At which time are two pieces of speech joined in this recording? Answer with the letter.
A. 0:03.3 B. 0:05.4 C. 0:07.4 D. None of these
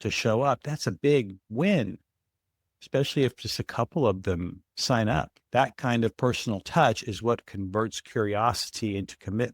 B